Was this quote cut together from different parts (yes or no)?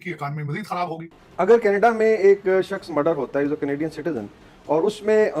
yes